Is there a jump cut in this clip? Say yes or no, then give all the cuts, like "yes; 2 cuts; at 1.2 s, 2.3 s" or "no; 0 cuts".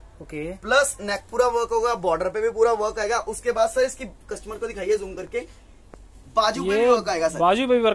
no; 0 cuts